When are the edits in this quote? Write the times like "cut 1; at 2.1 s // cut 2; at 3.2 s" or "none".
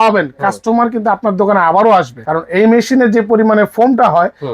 cut 1; at 2.2 s